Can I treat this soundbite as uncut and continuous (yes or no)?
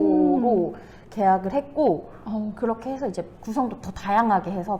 yes